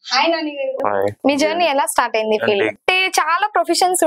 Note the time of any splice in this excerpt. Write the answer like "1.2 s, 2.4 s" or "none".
1.2 s, 2.8 s